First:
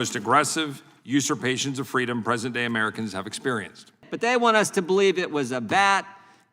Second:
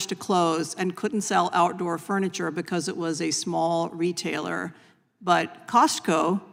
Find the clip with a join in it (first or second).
first